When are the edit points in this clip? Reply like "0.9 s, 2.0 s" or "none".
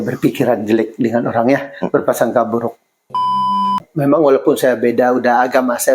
3.3 s

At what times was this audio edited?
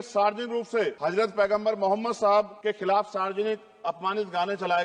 0.9 s, 2.5 s

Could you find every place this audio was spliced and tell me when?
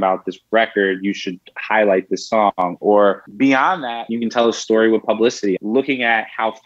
3.7 s, 5.6 s

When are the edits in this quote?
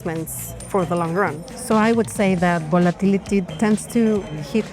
1.5 s, 3.5 s

